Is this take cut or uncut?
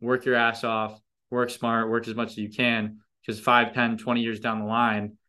uncut